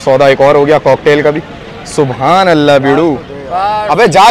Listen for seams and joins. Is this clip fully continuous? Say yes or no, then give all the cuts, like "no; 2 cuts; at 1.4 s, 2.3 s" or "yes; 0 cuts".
yes; 0 cuts